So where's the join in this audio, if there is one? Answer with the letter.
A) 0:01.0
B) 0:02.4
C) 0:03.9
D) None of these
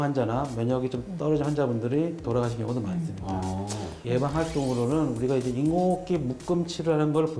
C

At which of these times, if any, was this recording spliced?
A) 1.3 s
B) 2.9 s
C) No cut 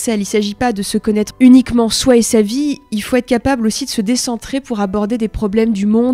A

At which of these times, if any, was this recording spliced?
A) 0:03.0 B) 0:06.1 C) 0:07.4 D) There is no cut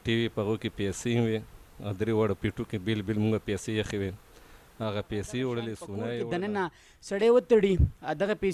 B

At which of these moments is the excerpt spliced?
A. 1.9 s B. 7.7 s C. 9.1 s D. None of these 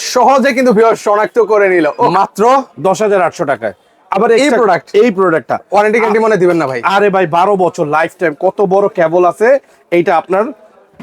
A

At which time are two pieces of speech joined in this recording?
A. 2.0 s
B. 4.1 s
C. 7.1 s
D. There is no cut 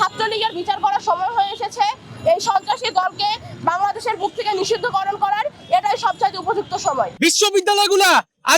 C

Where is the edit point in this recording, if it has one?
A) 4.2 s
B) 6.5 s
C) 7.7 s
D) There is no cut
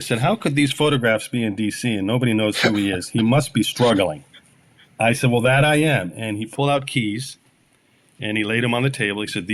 B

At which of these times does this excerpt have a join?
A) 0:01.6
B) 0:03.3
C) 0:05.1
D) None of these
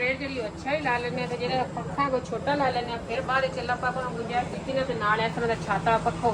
D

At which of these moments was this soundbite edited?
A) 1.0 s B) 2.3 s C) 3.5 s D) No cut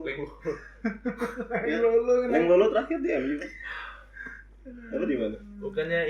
D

